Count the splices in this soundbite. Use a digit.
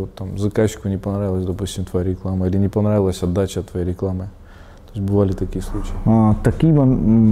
0